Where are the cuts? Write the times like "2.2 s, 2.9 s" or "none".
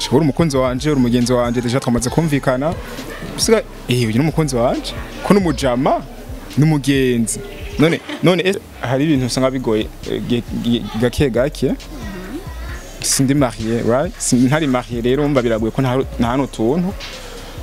8.6 s